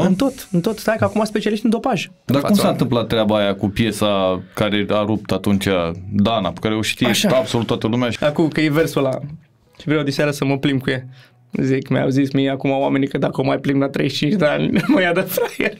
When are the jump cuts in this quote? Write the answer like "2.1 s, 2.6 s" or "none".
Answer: 2.1 s, 8.1 s